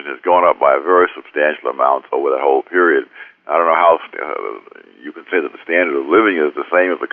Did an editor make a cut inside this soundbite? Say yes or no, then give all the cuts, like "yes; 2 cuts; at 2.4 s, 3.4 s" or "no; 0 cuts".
yes; 1 cut; at 6.1 s